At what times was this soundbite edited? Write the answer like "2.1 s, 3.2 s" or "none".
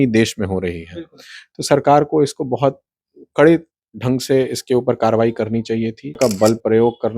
6.2 s